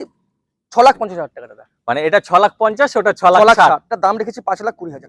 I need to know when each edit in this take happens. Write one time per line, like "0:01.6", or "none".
0:03.9